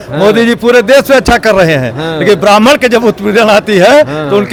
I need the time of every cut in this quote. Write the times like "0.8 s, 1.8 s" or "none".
none